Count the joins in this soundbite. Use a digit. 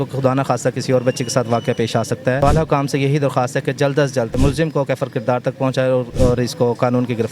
3